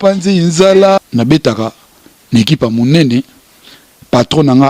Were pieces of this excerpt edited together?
yes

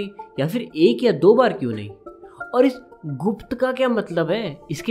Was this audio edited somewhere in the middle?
no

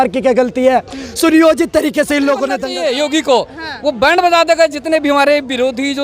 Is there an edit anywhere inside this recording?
yes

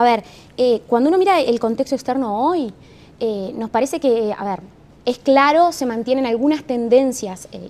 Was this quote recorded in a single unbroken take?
yes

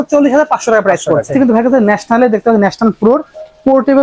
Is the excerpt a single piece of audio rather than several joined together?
no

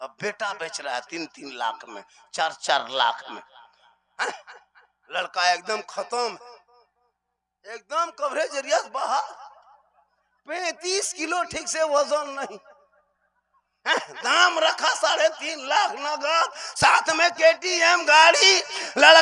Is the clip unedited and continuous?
yes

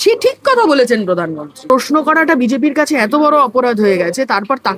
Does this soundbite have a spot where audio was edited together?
yes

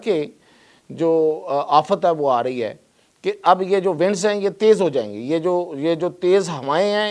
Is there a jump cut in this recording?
no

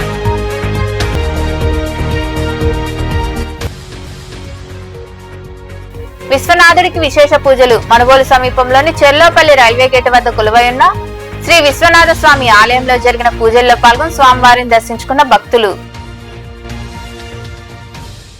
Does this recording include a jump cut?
yes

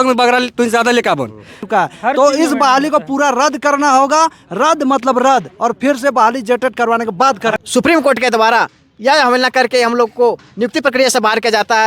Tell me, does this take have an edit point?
yes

